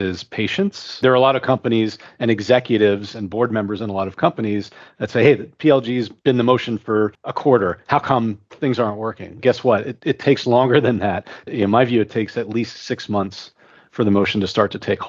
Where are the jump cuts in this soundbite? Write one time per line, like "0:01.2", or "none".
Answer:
0:01.0
0:06.1
0:07.2